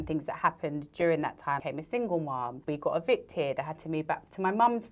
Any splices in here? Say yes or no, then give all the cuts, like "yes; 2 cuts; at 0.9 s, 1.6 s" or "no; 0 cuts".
yes; 2 cuts; at 1.6 s, 2.6 s